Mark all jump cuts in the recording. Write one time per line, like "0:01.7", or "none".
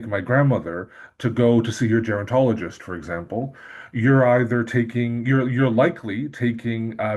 none